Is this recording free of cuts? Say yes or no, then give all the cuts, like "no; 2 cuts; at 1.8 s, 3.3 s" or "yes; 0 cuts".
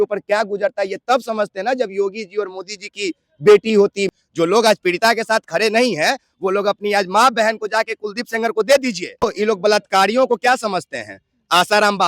no; 2 cuts; at 4.0 s, 9.2 s